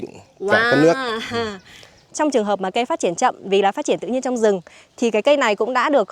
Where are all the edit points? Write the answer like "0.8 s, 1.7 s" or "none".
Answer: 2.1 s